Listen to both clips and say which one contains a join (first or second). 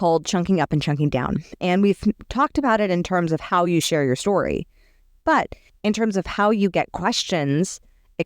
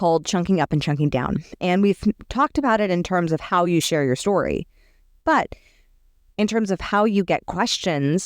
first